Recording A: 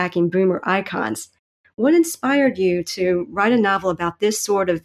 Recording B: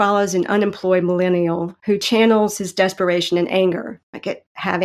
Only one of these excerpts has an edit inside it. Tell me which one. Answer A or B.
A